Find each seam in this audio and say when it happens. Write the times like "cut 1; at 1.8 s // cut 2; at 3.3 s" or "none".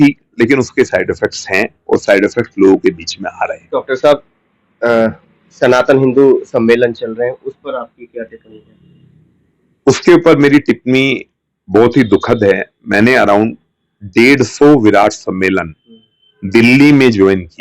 none